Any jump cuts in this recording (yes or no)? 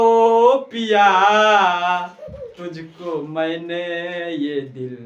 no